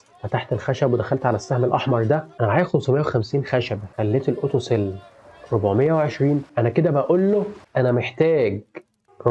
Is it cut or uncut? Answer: cut